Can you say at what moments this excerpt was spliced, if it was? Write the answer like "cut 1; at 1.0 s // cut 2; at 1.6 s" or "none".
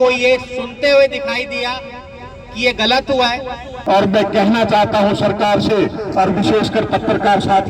cut 1; at 3.7 s